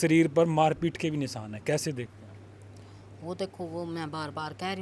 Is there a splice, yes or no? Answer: no